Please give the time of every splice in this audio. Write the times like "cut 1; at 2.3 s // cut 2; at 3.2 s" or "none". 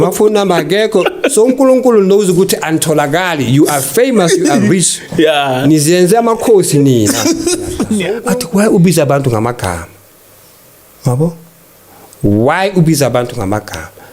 cut 1; at 8.2 s